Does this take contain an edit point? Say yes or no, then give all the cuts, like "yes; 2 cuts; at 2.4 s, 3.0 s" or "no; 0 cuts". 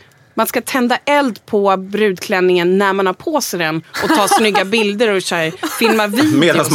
no; 0 cuts